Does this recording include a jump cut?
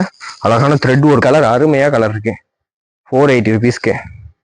yes; 1 cut; at 1.2 s

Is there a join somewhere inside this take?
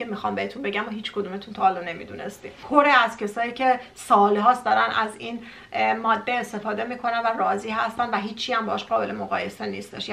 yes; 1 cut; at 2.5 s

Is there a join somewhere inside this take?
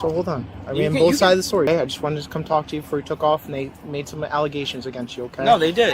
yes; 1 cut; at 1.7 s

